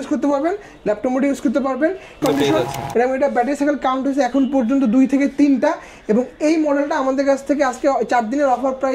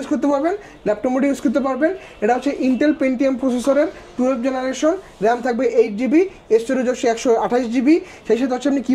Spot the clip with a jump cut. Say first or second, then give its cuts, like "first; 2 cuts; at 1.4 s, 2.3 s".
first; 1 cut; at 2.2 s